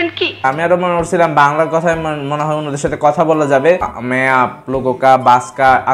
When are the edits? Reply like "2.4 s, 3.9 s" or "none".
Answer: 4.0 s

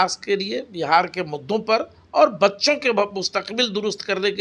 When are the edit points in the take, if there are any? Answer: none

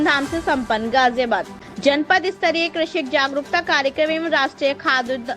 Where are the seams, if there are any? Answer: 1.6 s

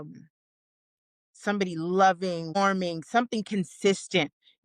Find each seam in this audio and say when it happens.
none

